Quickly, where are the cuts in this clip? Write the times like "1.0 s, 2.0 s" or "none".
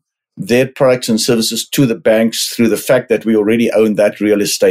none